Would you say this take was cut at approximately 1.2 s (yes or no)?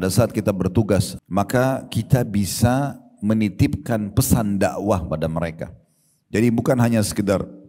yes